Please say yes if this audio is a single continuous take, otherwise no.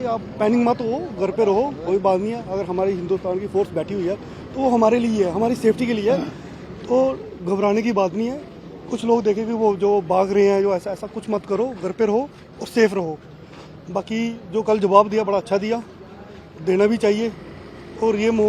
yes